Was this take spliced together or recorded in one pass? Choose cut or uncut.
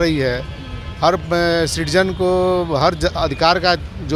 uncut